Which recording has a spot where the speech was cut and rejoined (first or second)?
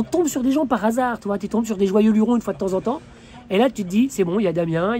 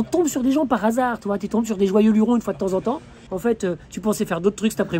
second